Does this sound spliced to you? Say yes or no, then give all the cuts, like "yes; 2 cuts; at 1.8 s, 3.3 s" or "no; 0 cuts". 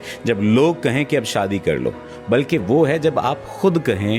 no; 0 cuts